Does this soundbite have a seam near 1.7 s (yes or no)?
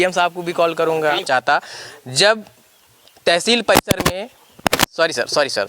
yes